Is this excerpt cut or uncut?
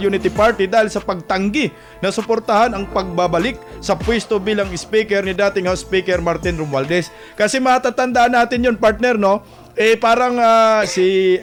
uncut